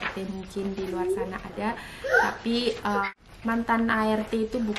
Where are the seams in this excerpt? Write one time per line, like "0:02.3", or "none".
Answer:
0:03.2